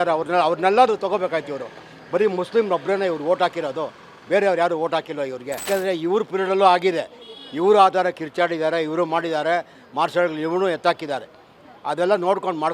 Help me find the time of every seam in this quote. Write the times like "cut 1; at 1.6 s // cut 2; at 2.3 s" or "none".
cut 1; at 5.7 s